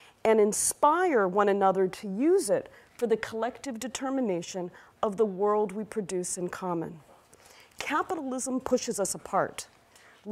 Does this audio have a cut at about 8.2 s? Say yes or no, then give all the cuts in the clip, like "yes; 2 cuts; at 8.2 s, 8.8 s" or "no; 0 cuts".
yes; 1 cut; at 8.2 s